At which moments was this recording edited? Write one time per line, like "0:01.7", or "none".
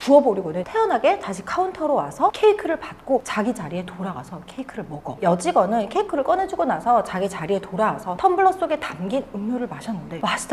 none